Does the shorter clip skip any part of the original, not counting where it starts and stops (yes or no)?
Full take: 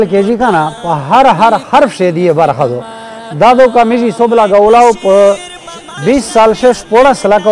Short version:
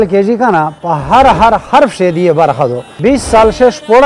yes